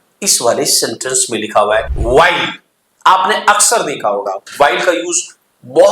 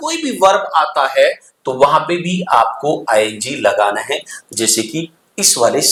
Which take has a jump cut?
first; 1 cut; at 1.9 s

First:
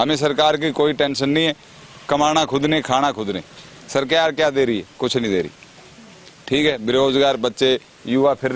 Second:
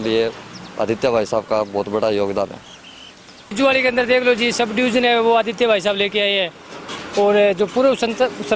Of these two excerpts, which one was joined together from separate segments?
second; 1 cut; at 3.5 s

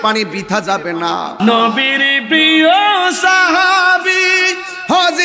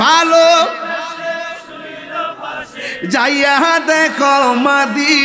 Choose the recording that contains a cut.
first; 1 cut; at 1.3 s

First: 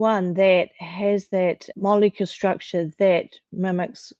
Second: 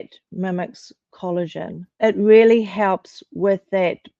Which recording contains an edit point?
second; 1 cut; at 1.9 s

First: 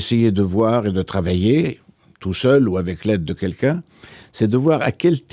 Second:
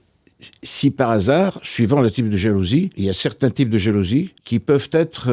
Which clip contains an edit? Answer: second; 2 cuts; at 2.9 s, 4.4 s

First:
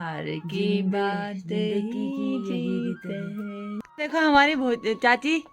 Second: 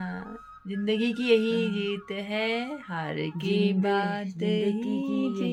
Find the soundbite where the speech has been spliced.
first; 1 cut; at 3.9 s

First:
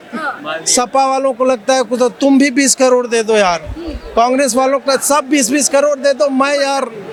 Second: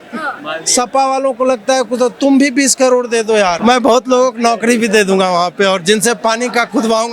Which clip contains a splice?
second; 1 cut; at 3.6 s

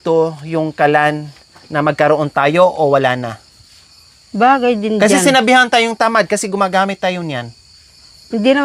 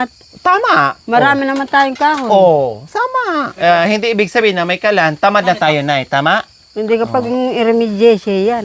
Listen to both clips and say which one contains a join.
second; 1 cut; at 3.5 s

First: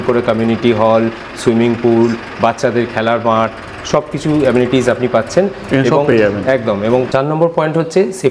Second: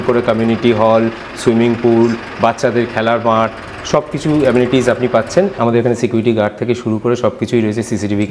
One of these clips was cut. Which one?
second; 1 cut; at 5.5 s

